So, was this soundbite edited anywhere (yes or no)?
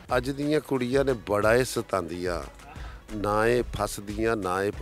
no